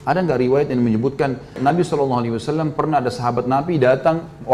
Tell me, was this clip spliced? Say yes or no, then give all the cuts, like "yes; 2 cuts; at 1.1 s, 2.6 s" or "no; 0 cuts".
yes; 1 cut; at 1.6 s